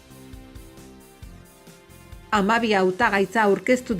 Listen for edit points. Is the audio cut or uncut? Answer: uncut